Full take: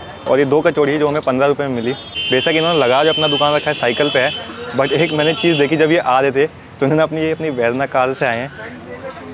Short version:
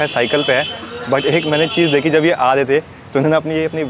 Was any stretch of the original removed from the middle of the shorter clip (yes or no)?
no